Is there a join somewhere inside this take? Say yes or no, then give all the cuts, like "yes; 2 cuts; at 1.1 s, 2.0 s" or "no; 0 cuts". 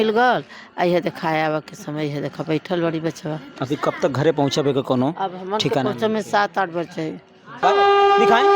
yes; 1 cut; at 7.6 s